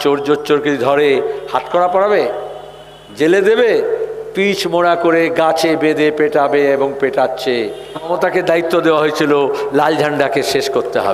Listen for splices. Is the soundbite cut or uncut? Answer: cut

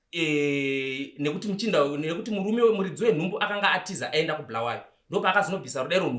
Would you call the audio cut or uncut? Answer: uncut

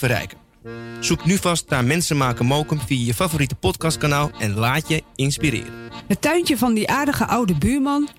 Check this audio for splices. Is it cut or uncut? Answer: cut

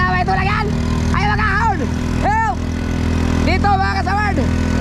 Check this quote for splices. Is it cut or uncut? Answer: uncut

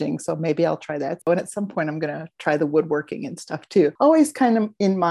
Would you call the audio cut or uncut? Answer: cut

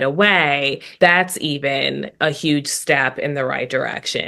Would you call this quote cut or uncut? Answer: cut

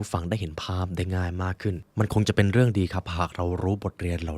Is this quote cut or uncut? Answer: cut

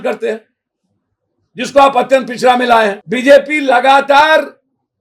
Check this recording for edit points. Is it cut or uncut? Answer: cut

